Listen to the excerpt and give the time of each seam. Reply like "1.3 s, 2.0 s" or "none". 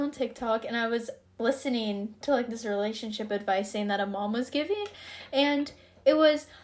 1.2 s